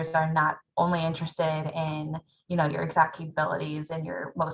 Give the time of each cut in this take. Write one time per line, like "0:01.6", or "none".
none